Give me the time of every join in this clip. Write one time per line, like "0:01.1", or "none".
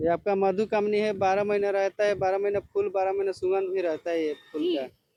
none